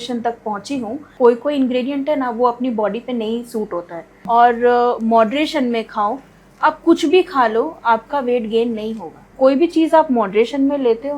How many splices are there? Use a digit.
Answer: 3